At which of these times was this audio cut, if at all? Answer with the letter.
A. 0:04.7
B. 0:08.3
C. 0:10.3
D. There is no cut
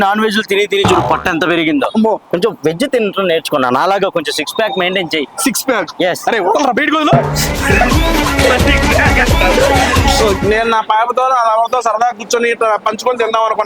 C